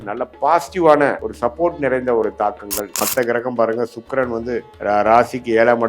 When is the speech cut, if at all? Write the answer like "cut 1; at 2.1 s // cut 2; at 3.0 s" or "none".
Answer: cut 1; at 1.3 s // cut 2; at 3.0 s // cut 3; at 4.7 s